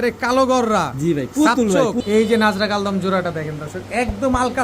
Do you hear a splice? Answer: yes; 1 cut; at 2.0 s

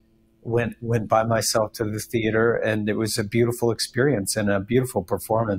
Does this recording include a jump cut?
no; 0 cuts

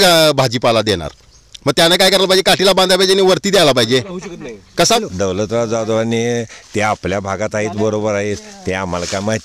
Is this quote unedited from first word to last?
no; 1 cut; at 5.0 s

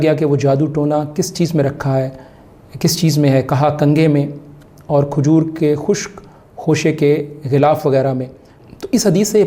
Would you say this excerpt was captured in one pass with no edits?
no; 1 cut; at 8.5 s

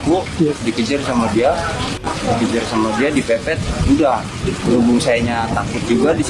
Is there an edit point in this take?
no; 0 cuts

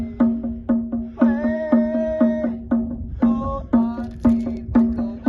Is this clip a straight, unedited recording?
yes; 0 cuts

